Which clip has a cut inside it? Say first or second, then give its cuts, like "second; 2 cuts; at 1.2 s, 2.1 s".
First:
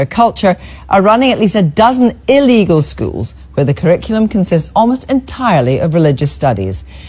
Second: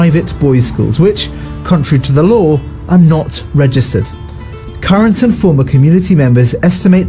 second; 1 cut; at 1.1 s